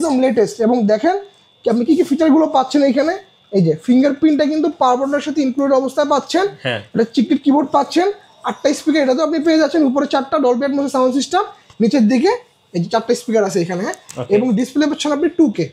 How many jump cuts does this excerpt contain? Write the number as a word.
zero